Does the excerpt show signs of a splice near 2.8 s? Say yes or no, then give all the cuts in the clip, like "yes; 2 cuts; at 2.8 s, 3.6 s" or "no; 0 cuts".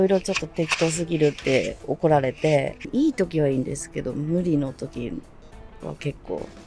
yes; 1 cut; at 2.8 s